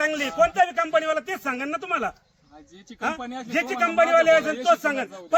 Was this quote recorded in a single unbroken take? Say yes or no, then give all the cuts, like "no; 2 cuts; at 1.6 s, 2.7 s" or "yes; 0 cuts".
yes; 0 cuts